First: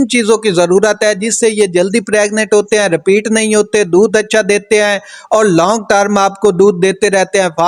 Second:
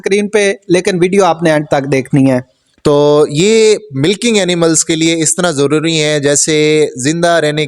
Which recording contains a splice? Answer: second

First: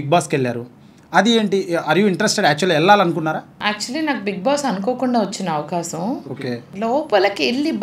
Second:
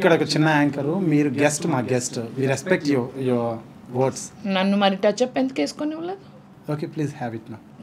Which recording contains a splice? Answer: first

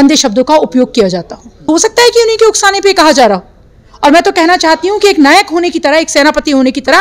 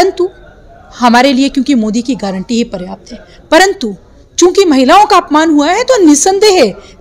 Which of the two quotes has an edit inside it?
first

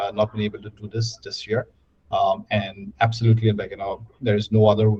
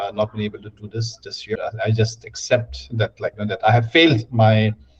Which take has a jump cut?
second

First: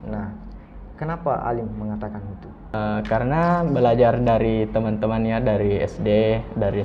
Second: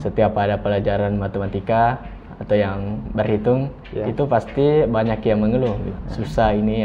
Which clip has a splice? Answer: first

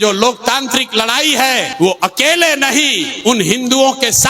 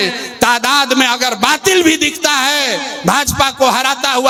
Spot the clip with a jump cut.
first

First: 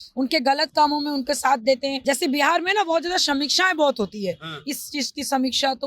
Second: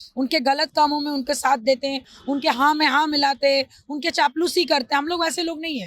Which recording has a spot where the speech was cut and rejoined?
first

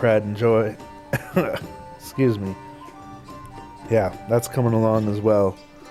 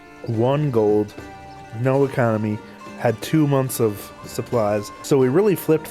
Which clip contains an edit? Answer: second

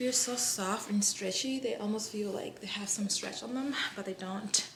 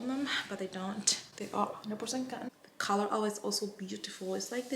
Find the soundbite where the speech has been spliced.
second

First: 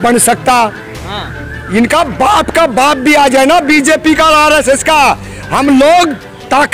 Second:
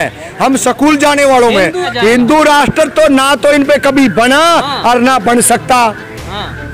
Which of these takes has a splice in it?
second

